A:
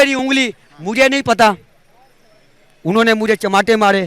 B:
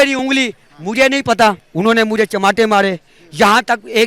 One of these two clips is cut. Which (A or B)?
B